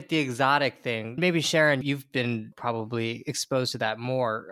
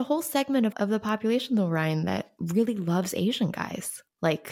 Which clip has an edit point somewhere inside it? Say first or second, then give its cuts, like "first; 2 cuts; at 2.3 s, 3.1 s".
second; 2 cuts; at 0.7 s, 2.4 s